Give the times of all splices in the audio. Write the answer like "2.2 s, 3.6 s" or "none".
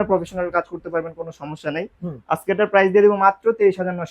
none